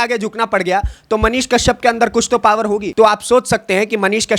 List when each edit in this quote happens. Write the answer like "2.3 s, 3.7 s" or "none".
2.9 s